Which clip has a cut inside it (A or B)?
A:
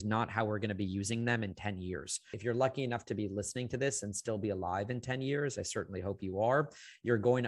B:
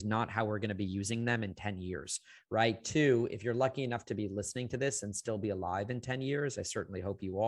A